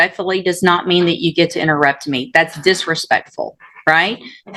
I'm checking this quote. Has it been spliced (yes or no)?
no